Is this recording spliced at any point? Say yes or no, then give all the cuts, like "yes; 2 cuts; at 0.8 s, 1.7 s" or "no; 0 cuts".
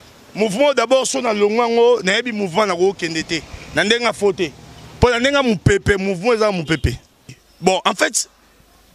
yes; 1 cut; at 7.4 s